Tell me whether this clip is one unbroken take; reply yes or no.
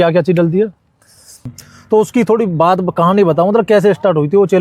no